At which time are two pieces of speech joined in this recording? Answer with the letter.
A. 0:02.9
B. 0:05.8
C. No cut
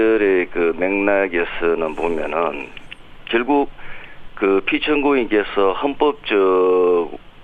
A